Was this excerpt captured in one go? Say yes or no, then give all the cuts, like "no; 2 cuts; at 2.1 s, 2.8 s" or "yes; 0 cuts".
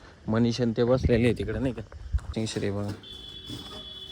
no; 1 cut; at 2.3 s